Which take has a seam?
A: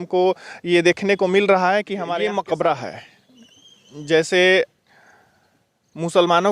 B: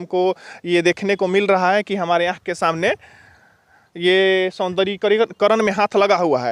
A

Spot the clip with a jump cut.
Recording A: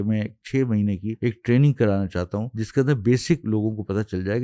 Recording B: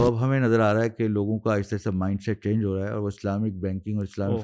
A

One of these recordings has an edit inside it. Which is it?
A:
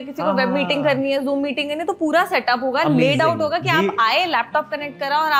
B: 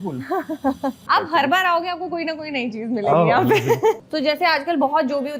B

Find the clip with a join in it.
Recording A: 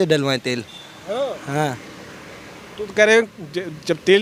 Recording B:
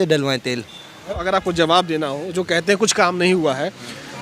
B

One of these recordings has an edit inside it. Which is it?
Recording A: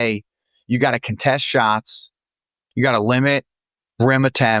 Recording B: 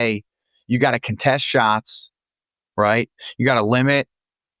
A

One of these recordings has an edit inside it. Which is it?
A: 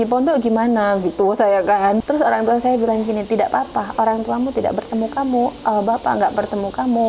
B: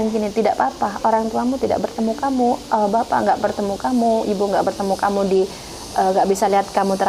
A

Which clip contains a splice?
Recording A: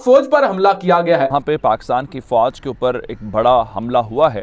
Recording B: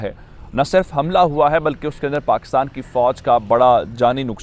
A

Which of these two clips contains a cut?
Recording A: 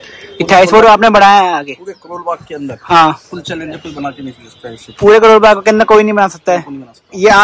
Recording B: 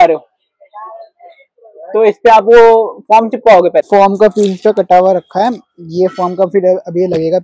B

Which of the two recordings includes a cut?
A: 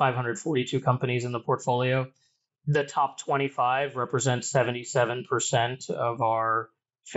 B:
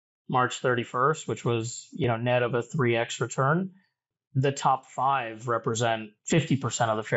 B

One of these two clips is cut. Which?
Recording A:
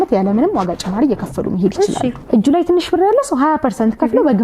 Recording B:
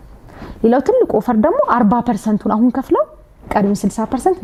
A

